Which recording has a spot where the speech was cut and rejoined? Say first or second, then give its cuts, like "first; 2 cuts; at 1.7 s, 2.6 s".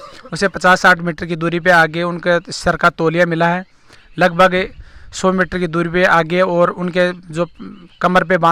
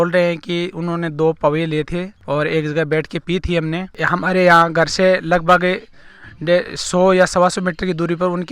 second; 1 cut; at 3.9 s